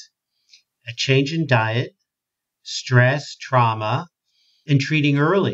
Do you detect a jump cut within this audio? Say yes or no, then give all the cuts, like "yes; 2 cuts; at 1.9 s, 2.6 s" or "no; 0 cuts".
yes; 1 cut; at 4.6 s